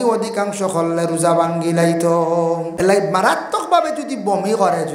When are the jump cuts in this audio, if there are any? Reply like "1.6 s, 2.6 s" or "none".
2.7 s